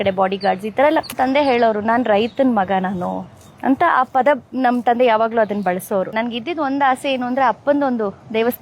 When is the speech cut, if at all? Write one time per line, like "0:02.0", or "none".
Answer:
0:01.2
0:06.2